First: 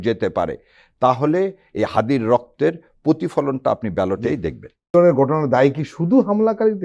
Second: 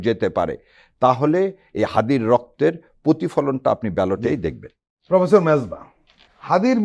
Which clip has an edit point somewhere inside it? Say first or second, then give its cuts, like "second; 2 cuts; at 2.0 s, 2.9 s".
first; 1 cut; at 4.9 s